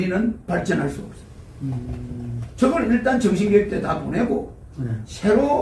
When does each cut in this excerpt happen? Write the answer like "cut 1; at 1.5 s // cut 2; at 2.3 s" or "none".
none